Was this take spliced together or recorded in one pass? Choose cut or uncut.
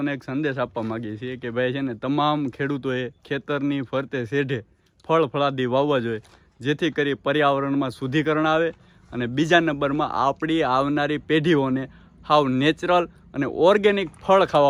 uncut